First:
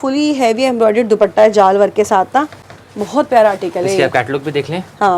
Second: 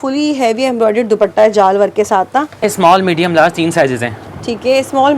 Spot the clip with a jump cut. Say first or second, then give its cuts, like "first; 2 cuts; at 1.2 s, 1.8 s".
second; 1 cut; at 2.6 s